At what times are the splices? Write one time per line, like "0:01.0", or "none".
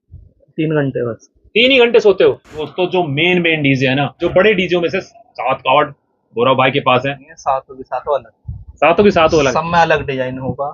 0:02.5
0:04.2
0:07.2